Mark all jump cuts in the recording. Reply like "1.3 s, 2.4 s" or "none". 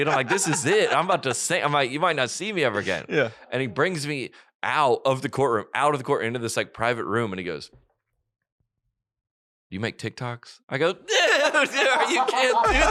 none